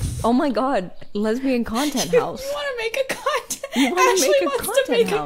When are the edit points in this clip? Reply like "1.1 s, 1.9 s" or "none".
1.0 s